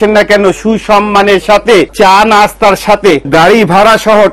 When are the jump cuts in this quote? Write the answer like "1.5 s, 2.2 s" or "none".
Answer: 1.9 s, 3.2 s